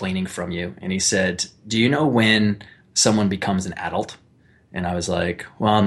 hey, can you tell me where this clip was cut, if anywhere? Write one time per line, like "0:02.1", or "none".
none